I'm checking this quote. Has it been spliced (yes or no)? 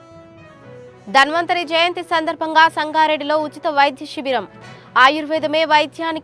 no